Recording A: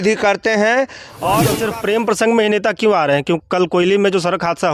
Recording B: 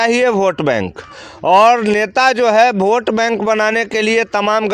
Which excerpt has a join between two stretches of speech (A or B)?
A